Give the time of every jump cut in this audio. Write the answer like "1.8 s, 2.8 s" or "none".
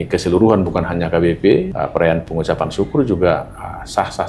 1.7 s